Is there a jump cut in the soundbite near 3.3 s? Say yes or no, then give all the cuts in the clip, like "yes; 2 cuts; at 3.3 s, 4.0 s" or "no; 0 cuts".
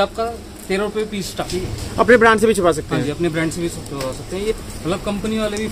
no; 2 cuts; at 1.4 s, 4.5 s